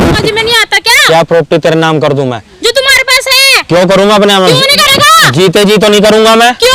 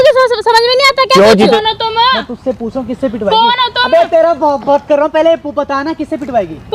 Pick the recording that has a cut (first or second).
second